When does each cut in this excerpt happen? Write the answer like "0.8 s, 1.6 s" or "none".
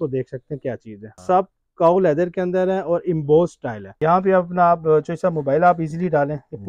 1.2 s, 3.8 s